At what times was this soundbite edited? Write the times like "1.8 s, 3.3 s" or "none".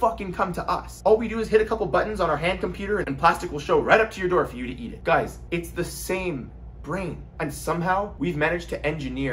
3.1 s